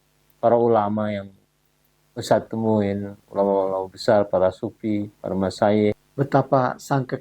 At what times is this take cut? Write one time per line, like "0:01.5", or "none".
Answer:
0:06.0